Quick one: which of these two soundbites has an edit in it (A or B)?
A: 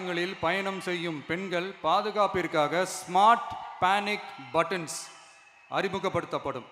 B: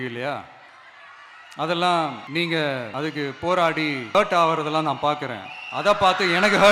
B